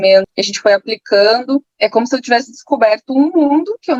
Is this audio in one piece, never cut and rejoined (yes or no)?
yes